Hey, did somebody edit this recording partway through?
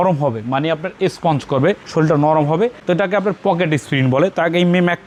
no; 0 cuts

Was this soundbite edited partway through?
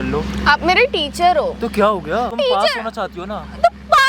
yes; 1 cut; at 2.3 s

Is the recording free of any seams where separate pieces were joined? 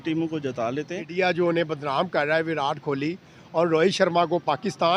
no; 1 cut; at 1.0 s

